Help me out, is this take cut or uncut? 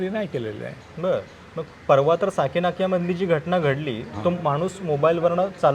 uncut